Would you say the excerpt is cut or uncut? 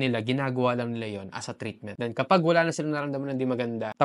uncut